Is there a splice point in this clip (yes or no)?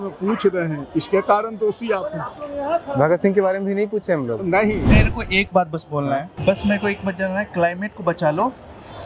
yes